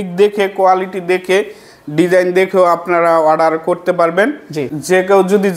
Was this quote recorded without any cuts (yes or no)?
no